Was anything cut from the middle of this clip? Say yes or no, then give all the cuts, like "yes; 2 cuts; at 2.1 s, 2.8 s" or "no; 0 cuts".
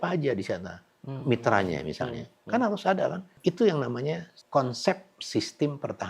yes; 2 cuts; at 3.3 s, 4.3 s